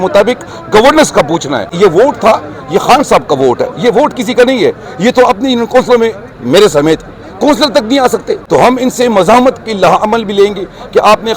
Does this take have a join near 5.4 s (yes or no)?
no